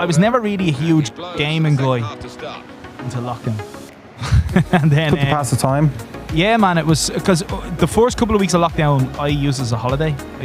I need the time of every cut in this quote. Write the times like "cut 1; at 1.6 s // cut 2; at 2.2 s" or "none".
none